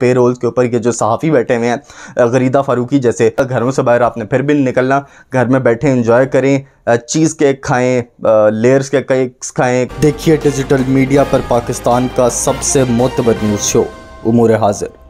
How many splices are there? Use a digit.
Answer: 2